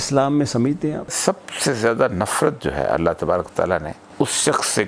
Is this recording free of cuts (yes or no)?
no